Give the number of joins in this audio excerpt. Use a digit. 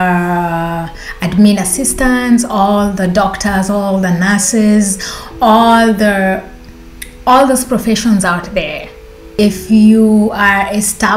1